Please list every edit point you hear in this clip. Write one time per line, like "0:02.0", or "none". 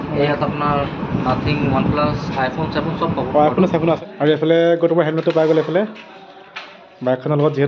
0:04.0